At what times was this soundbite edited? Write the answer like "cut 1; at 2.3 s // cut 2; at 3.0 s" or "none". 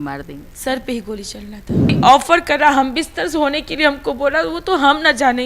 cut 1; at 2.0 s